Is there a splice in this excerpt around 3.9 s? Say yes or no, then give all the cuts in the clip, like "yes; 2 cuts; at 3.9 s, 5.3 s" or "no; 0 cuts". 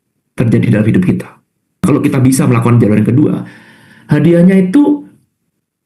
no; 1 cut; at 1.8 s